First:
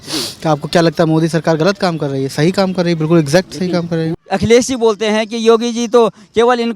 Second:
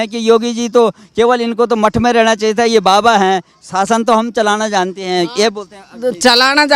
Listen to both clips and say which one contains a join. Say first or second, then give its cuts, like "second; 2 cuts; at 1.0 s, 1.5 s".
first; 1 cut; at 4.2 s